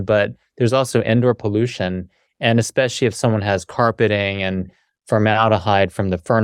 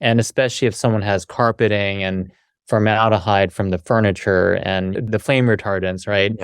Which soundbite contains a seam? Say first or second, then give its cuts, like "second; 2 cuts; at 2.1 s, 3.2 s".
second; 1 cut; at 5.0 s